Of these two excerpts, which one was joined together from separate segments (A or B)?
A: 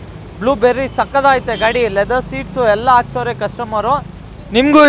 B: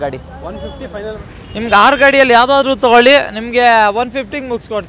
B